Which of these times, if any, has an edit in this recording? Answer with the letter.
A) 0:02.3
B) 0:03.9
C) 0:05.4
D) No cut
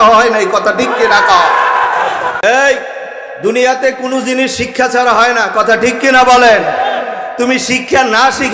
A